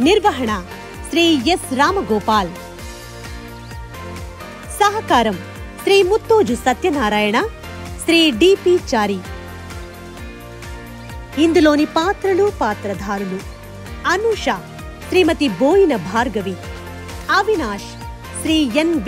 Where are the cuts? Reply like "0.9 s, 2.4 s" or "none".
2.5 s, 4.8 s, 9.2 s, 11.3 s